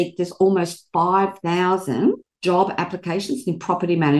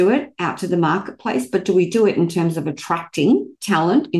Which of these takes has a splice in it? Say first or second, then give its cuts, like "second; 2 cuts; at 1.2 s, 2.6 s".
first; 1 cut; at 2.3 s